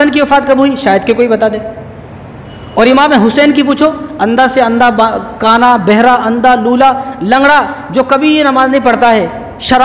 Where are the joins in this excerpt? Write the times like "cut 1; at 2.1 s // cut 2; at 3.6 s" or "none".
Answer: none